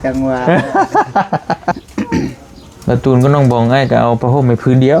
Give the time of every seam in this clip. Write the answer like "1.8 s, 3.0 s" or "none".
1.8 s